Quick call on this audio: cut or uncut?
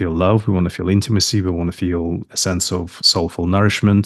uncut